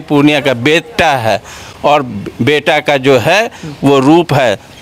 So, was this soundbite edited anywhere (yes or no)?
no